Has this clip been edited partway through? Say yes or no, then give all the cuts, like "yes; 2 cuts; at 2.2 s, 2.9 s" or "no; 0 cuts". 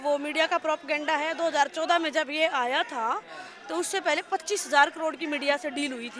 no; 0 cuts